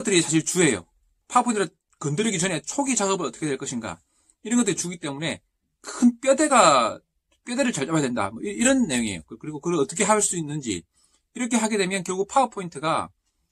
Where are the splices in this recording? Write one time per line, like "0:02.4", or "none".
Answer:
0:01.2
0:01.8

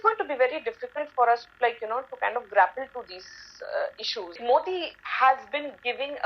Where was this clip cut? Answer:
0:04.4

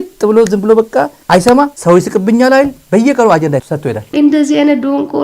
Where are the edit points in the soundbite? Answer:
0:01.8
0:02.8
0:04.0

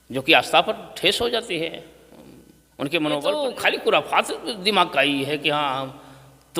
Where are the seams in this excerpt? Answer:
0:03.4

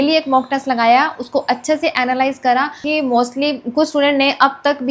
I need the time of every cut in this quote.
0:02.8

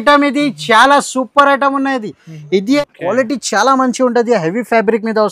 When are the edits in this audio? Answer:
0:02.6

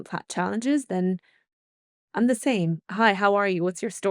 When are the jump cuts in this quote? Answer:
0:02.8

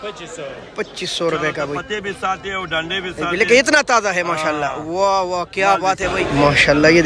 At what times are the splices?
0:01.8
0:06.1

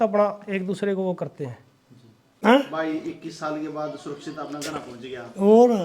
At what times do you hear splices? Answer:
0:02.2

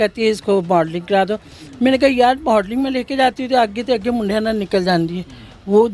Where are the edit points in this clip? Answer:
none

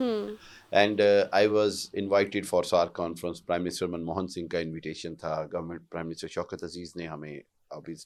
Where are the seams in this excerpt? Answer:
none

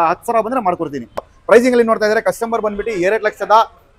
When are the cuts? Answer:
0:01.3

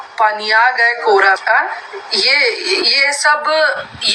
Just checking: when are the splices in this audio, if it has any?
0:01.4

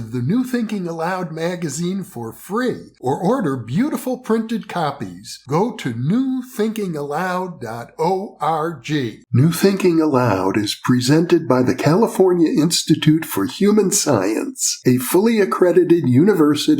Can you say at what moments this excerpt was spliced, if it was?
0:09.2

